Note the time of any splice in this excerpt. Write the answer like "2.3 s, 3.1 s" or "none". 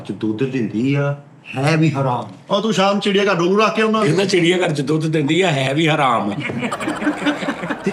none

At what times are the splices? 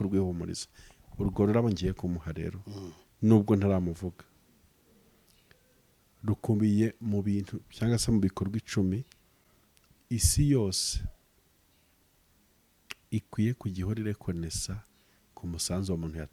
none

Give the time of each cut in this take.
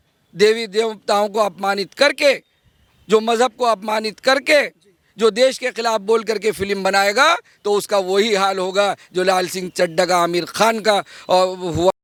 none

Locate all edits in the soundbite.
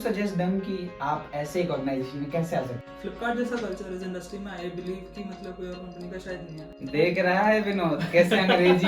2.8 s, 6.7 s

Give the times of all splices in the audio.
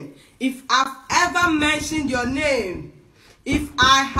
none

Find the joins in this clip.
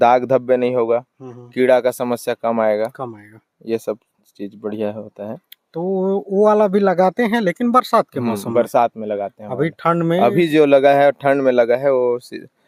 none

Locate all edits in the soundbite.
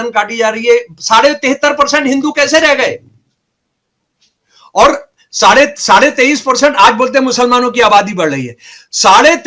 none

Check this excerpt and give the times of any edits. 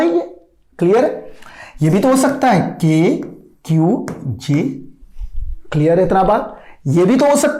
none

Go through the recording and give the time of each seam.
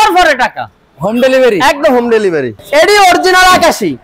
2.5 s

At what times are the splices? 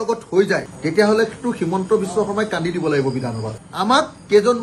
3.7 s

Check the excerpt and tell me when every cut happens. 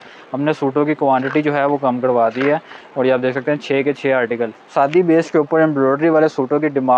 4.6 s

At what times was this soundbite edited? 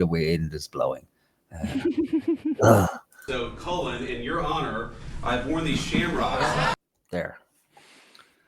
3.2 s

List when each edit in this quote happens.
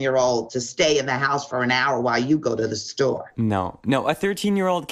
3.3 s

